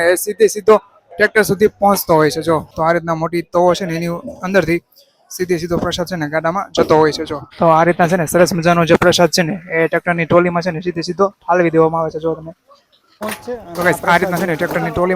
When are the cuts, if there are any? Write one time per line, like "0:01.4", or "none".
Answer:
0:02.7
0:07.4
0:13.2